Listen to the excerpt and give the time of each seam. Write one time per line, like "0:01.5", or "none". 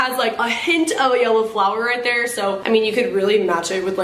none